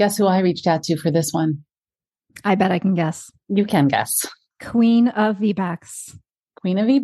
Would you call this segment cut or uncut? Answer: uncut